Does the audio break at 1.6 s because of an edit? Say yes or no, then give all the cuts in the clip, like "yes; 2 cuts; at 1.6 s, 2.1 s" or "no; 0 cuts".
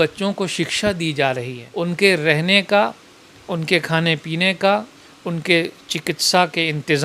yes; 1 cut; at 1.6 s